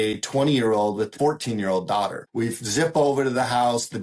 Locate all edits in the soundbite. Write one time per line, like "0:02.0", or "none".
0:01.1
0:02.2

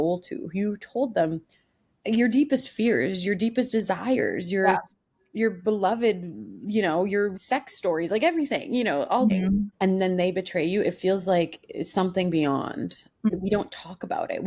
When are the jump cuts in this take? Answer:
0:09.3
0:13.3

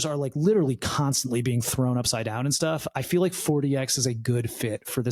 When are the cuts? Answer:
none

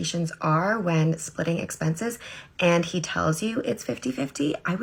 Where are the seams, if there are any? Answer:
none

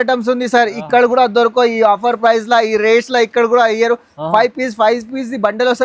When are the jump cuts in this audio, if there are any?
none

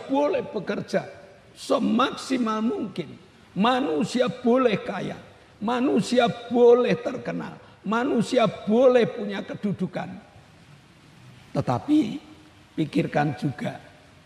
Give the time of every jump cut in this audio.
none

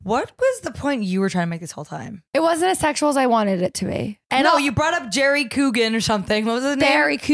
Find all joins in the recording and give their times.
0:02.3
0:04.2

